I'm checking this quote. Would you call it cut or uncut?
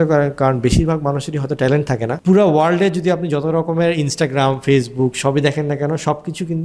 cut